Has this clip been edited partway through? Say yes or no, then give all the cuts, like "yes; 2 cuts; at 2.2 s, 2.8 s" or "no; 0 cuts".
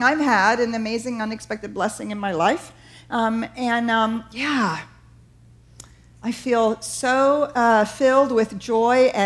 yes; 1 cut; at 6.3 s